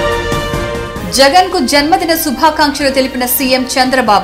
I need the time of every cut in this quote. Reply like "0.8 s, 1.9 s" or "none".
0.9 s